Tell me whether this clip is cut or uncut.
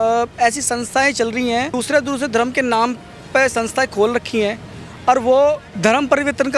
cut